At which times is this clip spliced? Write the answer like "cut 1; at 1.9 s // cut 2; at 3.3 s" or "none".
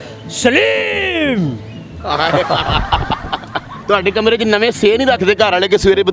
cut 1; at 3.6 s